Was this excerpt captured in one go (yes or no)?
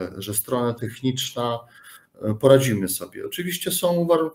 yes